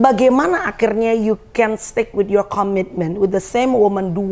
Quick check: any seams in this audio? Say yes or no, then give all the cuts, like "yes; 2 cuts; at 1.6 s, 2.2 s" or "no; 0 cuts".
no; 0 cuts